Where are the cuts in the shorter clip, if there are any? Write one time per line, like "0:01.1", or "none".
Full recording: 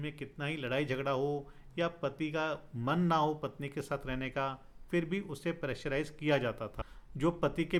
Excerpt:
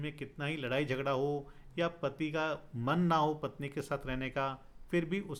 none